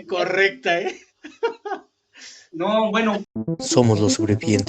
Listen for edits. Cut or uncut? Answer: cut